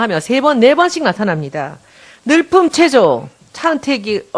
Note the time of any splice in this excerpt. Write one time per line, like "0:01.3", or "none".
0:01.9